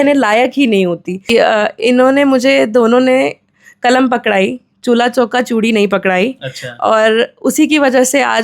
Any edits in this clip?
yes; 1 cut; at 1.3 s

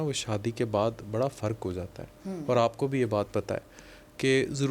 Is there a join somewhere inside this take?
no; 0 cuts

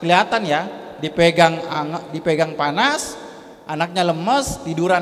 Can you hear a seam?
no; 0 cuts

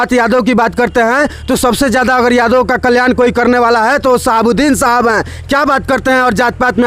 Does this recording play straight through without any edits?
yes; 0 cuts

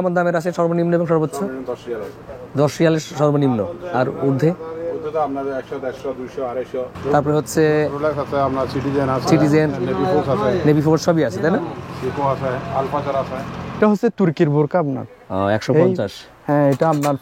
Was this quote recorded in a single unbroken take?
no; 2 cuts; at 6.9 s, 13.8 s

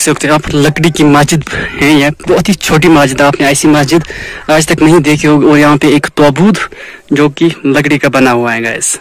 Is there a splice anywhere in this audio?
no; 0 cuts

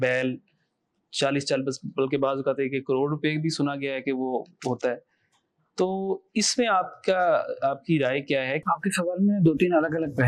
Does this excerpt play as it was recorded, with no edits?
yes; 0 cuts

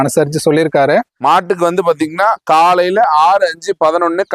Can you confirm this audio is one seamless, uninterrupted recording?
no; 1 cut; at 1.1 s

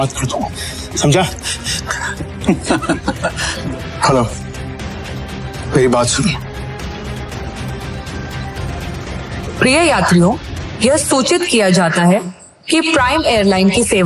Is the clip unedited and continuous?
no; 2 cuts; at 3.5 s, 7.3 s

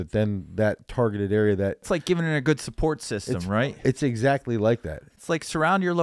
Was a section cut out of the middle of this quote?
yes; 2 cuts; at 1.9 s, 3.7 s

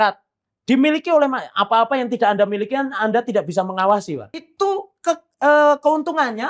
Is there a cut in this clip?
yes; 1 cut; at 4.5 s

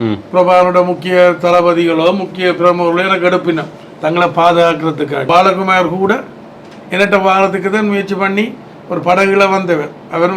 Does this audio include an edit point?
yes; 1 cut; at 5.3 s

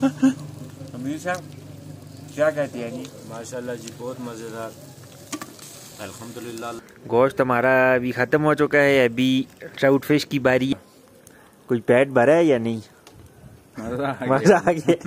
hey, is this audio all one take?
no; 2 cuts; at 6.8 s, 10.7 s

